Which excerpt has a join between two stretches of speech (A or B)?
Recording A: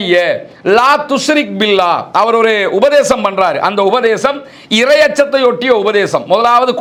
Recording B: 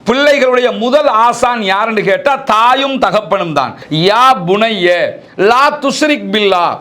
B